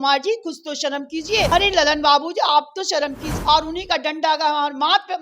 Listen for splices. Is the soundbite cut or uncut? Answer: cut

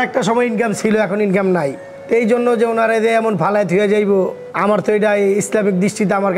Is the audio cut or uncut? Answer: uncut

